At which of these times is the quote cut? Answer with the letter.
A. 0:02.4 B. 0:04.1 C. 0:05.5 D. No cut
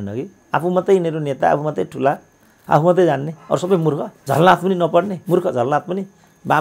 B